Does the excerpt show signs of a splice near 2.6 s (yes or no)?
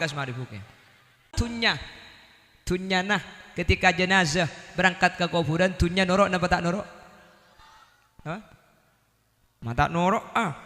no